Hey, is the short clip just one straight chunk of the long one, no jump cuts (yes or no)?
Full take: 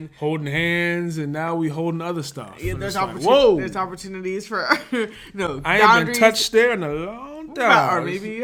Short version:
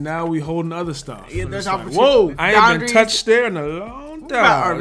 no